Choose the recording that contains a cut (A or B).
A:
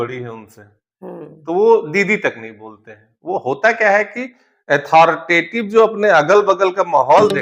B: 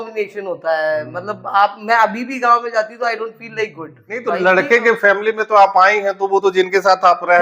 B